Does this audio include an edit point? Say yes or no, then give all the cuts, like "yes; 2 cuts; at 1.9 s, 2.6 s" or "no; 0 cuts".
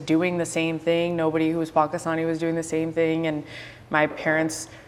no; 0 cuts